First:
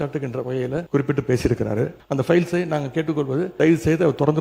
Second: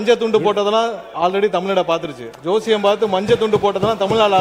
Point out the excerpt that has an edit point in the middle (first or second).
first